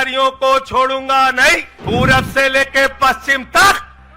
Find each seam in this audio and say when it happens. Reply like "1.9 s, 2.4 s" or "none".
1.7 s